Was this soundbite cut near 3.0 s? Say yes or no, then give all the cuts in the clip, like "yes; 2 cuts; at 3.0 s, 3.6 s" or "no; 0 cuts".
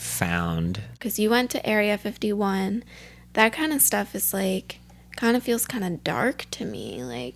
no; 1 cut; at 1.0 s